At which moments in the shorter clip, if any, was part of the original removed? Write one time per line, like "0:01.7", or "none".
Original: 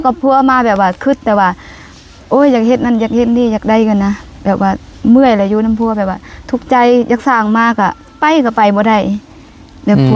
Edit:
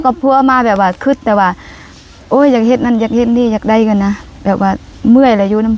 none